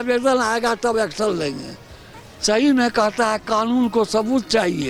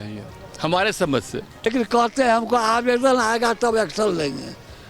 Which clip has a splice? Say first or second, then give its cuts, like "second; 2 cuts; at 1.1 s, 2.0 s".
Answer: second; 1 cut; at 1.7 s